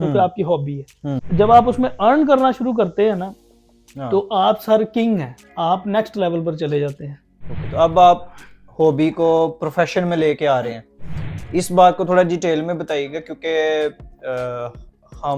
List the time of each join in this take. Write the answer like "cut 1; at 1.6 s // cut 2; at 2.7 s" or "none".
cut 1; at 1.2 s